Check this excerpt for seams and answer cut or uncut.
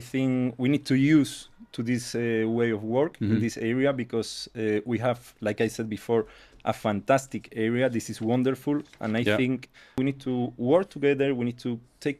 cut